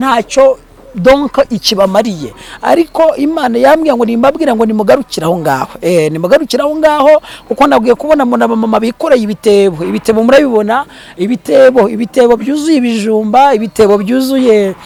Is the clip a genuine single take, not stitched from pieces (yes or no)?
yes